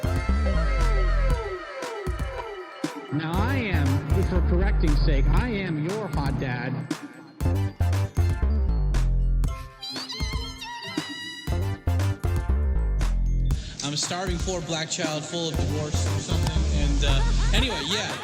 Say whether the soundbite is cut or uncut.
uncut